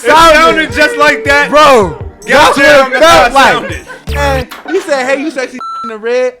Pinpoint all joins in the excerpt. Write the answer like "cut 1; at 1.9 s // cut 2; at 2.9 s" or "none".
cut 1; at 4.2 s